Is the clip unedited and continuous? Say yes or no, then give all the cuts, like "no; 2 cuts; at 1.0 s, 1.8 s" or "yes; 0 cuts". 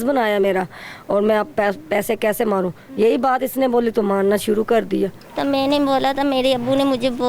no; 1 cut; at 5.2 s